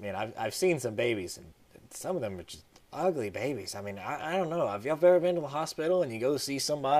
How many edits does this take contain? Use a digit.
1